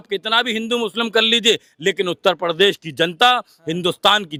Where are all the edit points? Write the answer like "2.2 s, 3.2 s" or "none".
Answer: none